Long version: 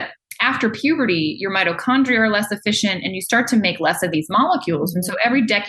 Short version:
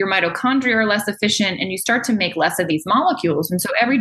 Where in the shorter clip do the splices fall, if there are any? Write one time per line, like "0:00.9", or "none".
none